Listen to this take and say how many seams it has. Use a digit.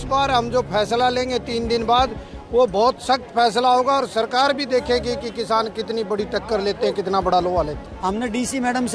1